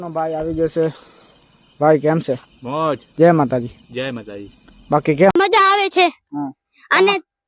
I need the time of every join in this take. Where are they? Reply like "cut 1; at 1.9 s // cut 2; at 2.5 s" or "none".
cut 1; at 5.3 s